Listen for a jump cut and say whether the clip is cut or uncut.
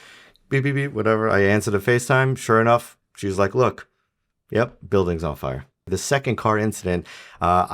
cut